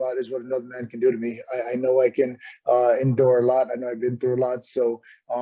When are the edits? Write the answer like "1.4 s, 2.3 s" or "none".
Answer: none